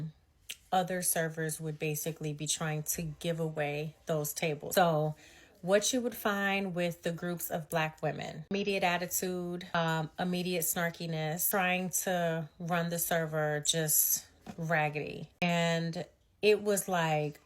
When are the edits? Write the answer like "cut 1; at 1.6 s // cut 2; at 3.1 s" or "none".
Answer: cut 1; at 4.7 s // cut 2; at 8.5 s // cut 3; at 9.7 s // cut 4; at 11.4 s // cut 5; at 15.4 s